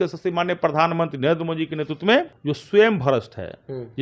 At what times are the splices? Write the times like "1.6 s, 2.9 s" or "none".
2.4 s